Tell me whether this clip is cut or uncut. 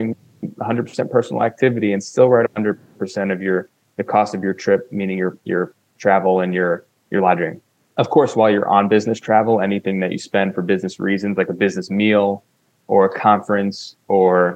uncut